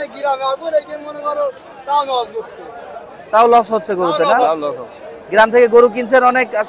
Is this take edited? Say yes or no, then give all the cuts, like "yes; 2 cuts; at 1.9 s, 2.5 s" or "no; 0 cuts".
no; 0 cuts